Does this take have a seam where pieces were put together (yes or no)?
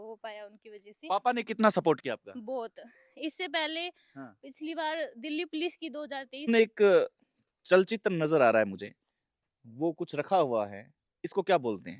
yes